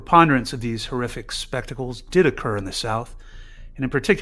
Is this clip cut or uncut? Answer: uncut